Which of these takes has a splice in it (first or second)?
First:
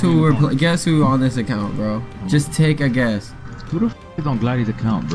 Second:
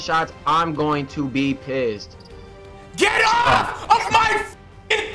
second